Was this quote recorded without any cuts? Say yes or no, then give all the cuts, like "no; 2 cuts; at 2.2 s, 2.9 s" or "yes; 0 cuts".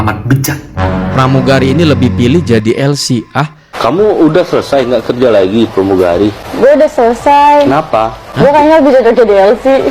no; 4 cuts; at 0.9 s, 3.6 s, 6.4 s, 8.2 s